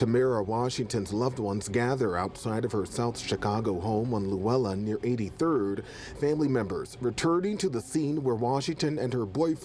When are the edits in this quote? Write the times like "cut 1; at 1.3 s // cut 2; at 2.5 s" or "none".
none